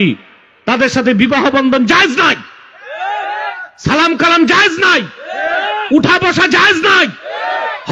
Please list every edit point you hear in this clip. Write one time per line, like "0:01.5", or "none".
none